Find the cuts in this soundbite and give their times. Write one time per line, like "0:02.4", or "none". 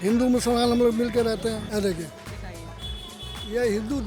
none

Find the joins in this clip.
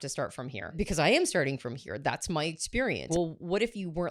0:00.7
0:03.1

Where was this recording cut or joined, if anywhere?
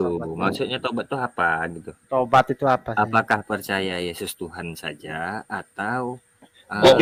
none

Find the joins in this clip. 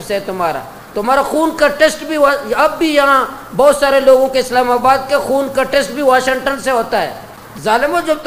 0:07.3

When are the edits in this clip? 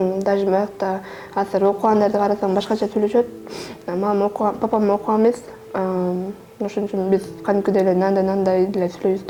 none

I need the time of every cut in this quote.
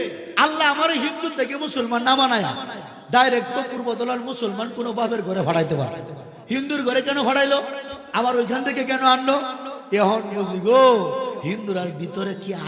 none

